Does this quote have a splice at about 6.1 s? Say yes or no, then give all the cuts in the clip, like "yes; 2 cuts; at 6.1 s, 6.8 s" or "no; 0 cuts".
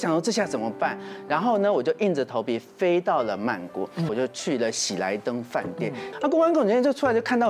yes; 2 cuts; at 4.1 s, 6.1 s